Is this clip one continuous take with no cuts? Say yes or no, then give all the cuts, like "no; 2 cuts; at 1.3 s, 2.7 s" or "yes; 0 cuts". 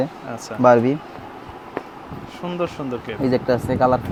yes; 0 cuts